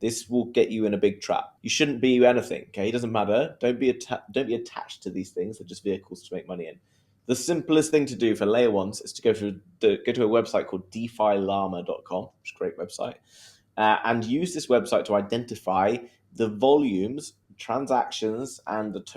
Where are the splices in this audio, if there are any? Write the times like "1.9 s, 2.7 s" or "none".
1.6 s